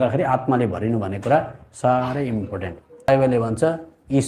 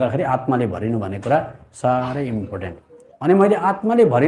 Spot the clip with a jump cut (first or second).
first